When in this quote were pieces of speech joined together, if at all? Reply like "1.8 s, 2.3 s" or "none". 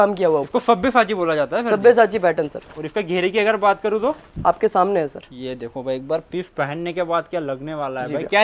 none